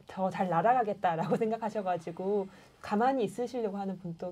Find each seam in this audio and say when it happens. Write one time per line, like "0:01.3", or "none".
none